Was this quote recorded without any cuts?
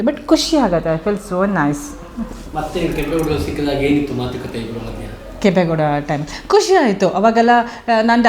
yes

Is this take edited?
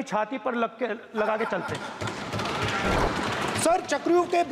yes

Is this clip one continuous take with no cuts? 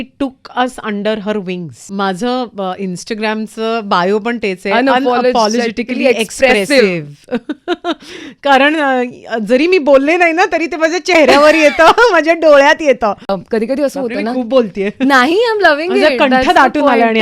no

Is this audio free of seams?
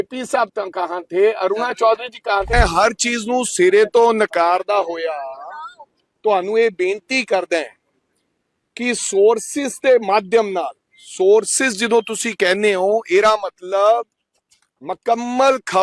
no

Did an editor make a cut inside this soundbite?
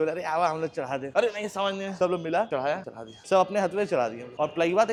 no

